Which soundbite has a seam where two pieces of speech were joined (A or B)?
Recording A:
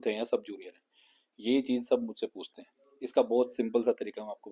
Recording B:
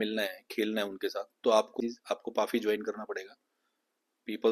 B